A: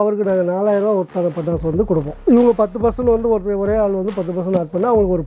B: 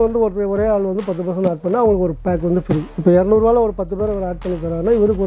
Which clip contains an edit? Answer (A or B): A